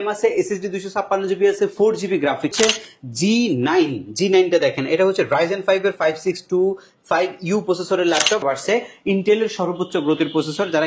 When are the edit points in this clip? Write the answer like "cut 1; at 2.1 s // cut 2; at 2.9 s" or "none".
cut 1; at 2.5 s // cut 2; at 8.4 s